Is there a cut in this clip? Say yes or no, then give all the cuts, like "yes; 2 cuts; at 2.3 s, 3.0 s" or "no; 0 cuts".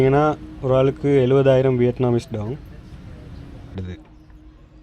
yes; 1 cut; at 3.8 s